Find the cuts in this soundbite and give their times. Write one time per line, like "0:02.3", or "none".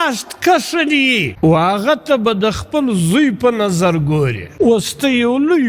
0:01.3
0:04.4